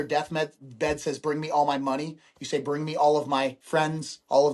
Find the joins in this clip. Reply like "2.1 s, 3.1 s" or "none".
3.6 s